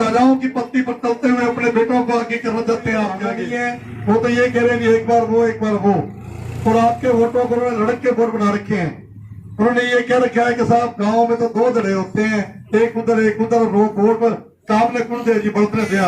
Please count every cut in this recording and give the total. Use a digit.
1